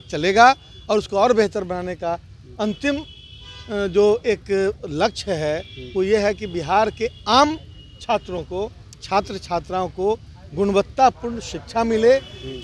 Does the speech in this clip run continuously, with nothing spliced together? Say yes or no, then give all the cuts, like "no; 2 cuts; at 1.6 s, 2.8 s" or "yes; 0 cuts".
yes; 0 cuts